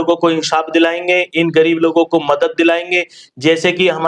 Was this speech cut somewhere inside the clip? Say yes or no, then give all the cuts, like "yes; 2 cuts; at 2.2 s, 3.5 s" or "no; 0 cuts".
no; 0 cuts